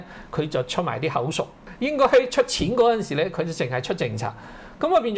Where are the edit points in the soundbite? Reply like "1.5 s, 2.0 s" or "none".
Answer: 1.6 s

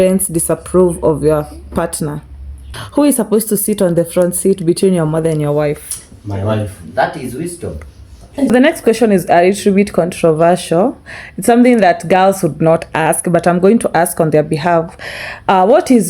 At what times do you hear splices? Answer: 2.7 s, 8.5 s

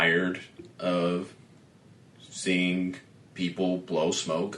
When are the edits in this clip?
none

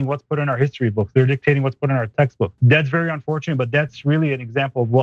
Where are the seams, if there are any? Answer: 2.6 s

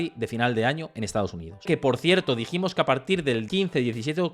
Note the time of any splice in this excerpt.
1.7 s, 3.5 s

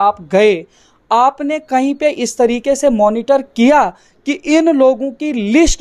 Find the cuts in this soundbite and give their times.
none

